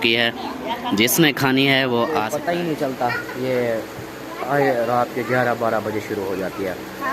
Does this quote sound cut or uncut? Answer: cut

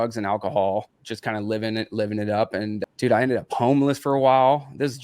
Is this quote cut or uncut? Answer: cut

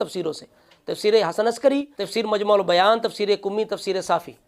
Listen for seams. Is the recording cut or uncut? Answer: cut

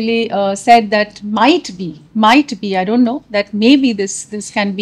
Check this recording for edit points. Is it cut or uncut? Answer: uncut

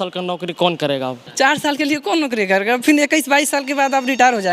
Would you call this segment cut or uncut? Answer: cut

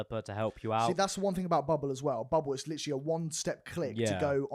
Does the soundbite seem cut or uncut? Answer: uncut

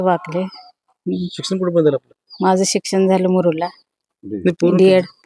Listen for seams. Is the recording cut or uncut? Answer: uncut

